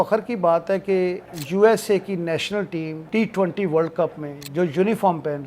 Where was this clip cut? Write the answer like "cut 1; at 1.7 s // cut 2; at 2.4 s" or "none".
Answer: cut 1; at 1.2 s // cut 2; at 3.0 s